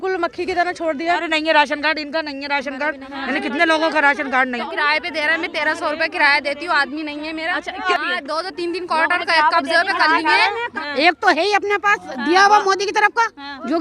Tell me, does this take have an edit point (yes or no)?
yes